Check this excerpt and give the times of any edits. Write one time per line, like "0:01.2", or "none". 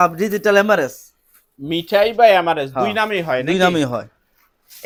none